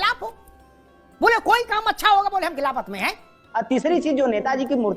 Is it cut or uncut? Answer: cut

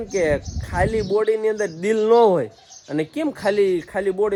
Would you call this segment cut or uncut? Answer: uncut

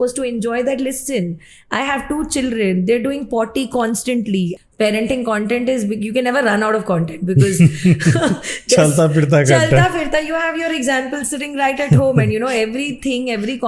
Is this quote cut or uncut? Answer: cut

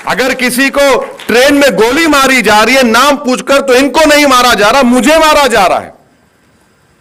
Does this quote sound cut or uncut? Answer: uncut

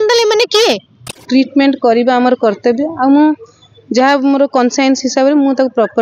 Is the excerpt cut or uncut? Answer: cut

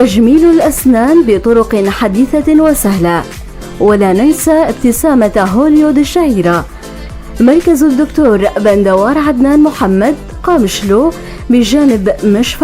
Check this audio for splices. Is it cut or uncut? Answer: cut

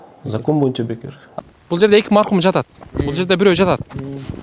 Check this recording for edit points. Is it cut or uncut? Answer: cut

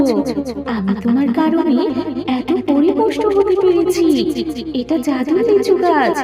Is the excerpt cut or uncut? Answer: uncut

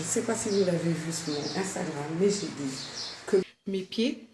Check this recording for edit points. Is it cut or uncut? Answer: cut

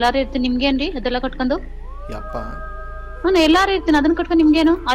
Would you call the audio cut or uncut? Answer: uncut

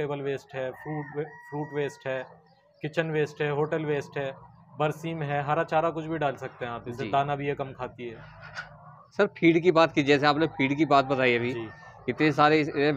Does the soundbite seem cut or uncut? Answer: uncut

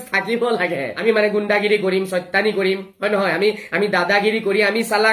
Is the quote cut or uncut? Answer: cut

